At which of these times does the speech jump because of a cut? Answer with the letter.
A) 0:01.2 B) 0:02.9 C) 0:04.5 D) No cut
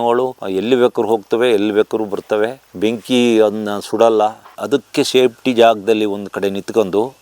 C